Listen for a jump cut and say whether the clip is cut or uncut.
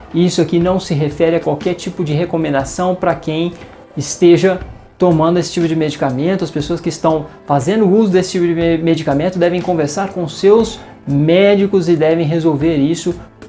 uncut